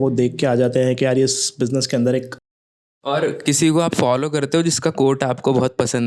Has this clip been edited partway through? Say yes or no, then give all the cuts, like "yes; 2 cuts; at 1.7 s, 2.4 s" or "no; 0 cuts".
yes; 1 cut; at 2.4 s